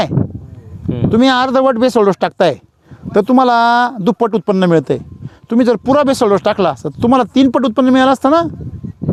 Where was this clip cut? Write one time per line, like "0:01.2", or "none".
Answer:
none